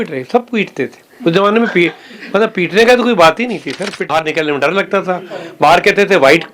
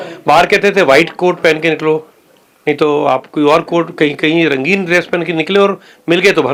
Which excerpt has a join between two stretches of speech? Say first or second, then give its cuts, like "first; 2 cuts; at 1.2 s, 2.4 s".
first; 1 cut; at 4.1 s